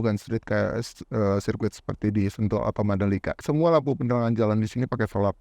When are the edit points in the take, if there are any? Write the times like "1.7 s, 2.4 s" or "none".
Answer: 3.4 s